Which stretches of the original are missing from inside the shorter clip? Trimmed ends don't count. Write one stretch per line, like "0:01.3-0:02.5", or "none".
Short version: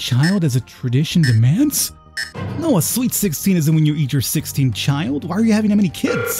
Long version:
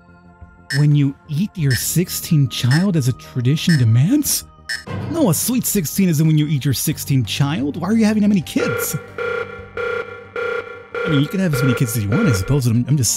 none